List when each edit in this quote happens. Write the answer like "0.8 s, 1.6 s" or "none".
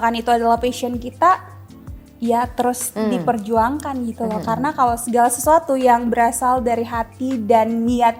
none